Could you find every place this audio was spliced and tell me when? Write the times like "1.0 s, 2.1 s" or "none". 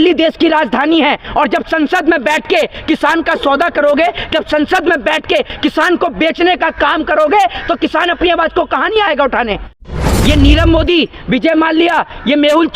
9.9 s